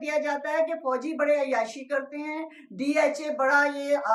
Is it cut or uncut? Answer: uncut